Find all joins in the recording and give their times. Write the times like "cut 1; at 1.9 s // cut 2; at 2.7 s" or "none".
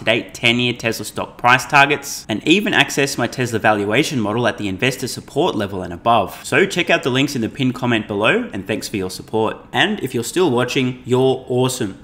none